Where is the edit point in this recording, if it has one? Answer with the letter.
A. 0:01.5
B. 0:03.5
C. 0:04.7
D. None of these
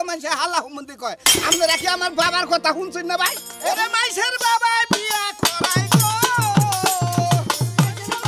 B